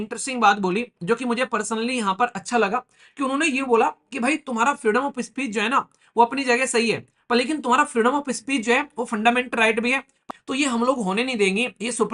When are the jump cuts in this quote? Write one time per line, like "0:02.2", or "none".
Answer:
0:10.2

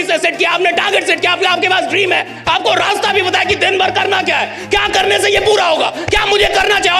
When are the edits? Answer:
none

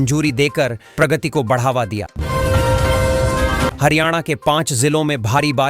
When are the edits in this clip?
0:02.1
0:03.7

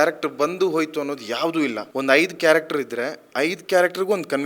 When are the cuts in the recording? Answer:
0:01.8

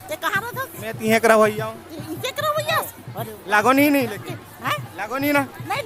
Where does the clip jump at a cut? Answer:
none

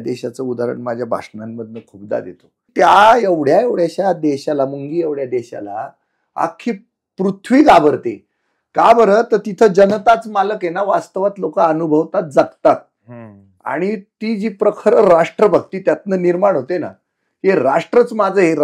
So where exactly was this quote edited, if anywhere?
0:02.7

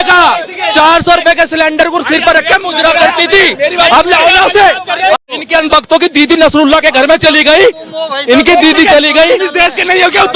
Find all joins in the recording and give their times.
0:05.2

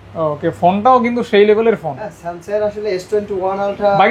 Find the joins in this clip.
none

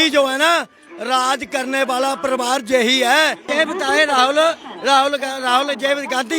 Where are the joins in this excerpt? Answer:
0:03.4

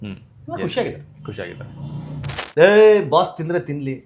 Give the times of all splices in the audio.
0:02.3

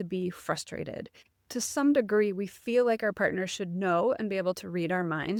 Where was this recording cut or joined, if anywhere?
none

